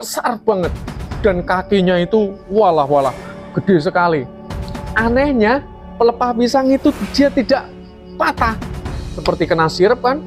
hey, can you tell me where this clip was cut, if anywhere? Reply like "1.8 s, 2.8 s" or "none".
9.2 s